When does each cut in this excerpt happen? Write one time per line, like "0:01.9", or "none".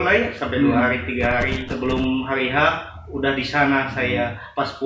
0:01.6